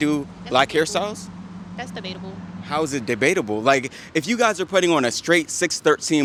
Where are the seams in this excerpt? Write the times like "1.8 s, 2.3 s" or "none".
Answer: none